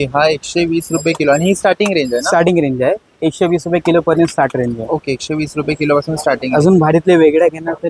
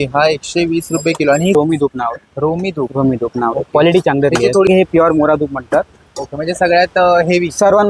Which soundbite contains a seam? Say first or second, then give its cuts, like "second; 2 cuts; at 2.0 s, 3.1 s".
second; 2 cuts; at 1.5 s, 4.7 s